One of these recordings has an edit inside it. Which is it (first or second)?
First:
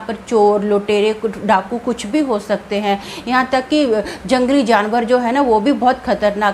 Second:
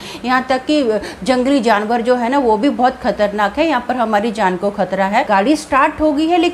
second